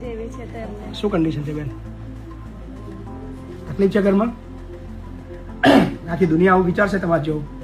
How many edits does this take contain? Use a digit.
0